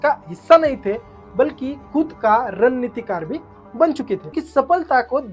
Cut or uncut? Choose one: cut